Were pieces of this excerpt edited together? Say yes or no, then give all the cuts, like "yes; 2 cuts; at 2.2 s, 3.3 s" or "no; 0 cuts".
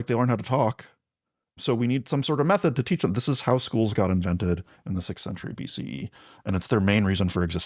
yes; 1 cut; at 1.6 s